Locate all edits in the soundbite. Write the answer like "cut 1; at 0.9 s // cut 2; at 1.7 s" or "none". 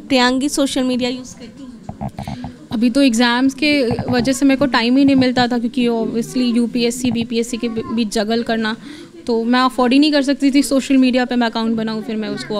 none